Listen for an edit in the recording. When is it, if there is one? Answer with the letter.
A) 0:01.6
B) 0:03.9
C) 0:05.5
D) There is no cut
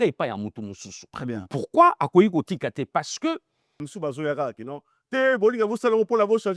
B